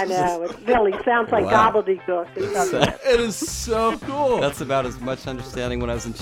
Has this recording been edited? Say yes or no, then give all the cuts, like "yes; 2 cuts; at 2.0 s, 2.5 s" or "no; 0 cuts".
no; 0 cuts